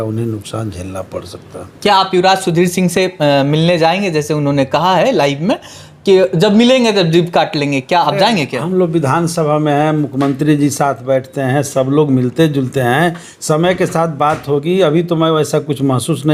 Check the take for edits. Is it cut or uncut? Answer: uncut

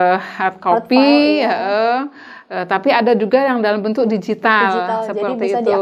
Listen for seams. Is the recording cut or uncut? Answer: uncut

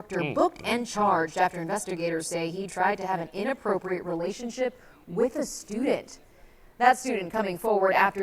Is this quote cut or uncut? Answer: cut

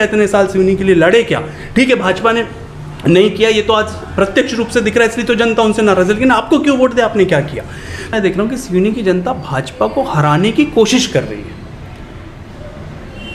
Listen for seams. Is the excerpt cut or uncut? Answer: cut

